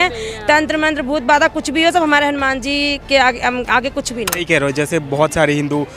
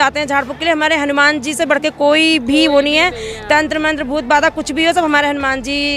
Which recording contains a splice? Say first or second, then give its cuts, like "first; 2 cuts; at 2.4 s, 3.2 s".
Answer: first; 1 cut; at 4.4 s